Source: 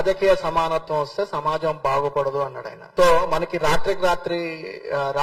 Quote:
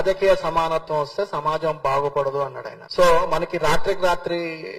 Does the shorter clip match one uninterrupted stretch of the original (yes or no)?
yes